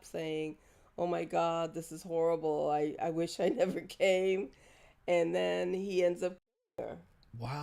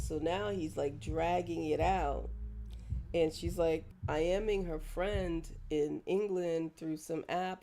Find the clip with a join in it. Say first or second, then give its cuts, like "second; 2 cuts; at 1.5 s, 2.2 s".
second; 1 cut; at 3.9 s